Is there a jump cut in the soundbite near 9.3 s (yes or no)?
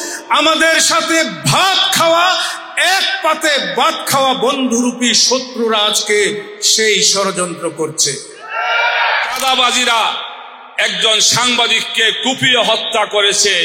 yes